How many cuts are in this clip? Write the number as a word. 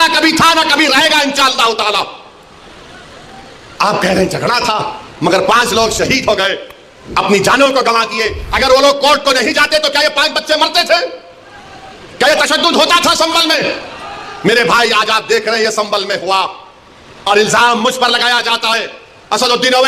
zero